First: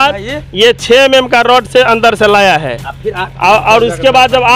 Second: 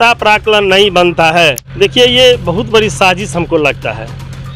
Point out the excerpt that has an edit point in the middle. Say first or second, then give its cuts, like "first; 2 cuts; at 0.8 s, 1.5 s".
second; 1 cut; at 1.6 s